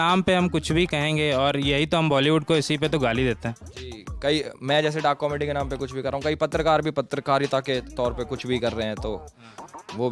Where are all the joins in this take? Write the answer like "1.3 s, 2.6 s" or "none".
none